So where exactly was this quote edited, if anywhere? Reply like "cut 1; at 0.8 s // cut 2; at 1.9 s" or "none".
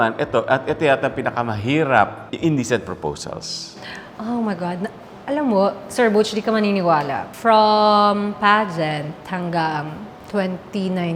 cut 1; at 2.2 s // cut 2; at 7.2 s